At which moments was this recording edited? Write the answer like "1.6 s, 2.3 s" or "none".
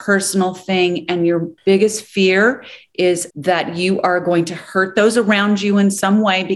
3.3 s